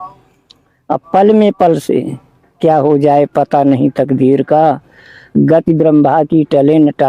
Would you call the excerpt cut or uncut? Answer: uncut